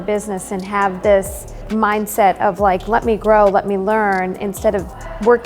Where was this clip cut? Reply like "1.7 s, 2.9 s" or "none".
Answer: 1.7 s